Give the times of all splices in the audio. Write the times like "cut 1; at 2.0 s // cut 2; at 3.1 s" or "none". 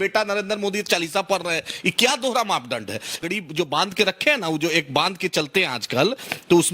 cut 1; at 3.2 s